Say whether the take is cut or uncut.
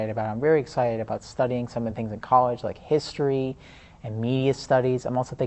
uncut